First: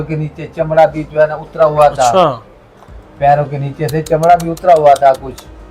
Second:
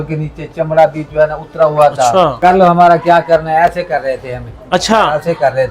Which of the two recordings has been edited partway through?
second; 1 cut; at 2.3 s

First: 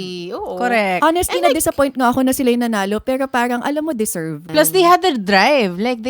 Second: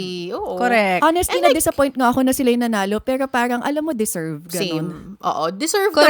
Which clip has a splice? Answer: first; 1 cut; at 4.4 s

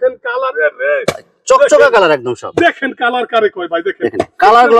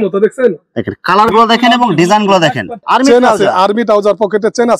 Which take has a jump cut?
second; 1 cut; at 2.7 s

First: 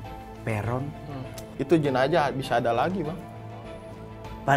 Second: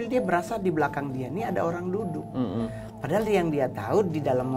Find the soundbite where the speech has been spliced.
first; 1 cut; at 1.4 s

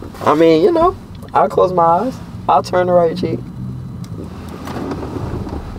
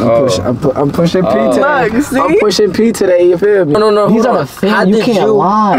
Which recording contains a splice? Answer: second; 1 cut; at 3.7 s

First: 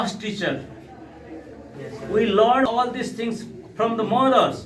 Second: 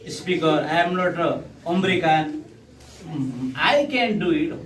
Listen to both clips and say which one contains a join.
first; 1 cut; at 2.7 s

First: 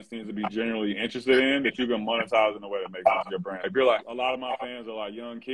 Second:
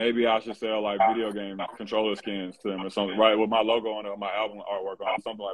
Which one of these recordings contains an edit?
first; 1 cut; at 3.7 s

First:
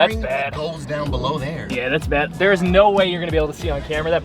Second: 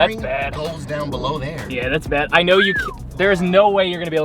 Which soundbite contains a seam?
first; 1 cut; at 2.3 s

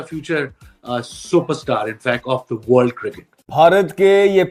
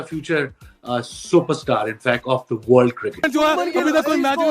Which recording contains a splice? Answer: second; 1 cut; at 3.3 s

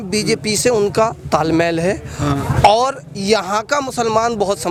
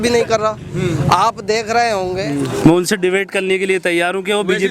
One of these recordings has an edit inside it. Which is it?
second; 1 cut; at 2.2 s

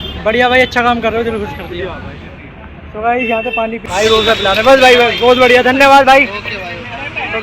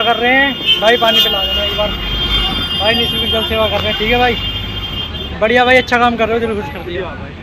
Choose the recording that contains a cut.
first; 1 cut; at 3.8 s

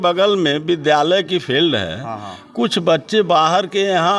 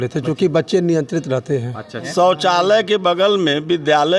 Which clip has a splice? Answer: second; 1 cut; at 2.0 s

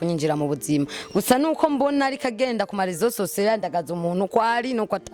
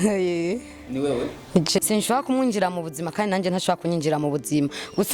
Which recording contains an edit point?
second; 1 cut; at 1.8 s

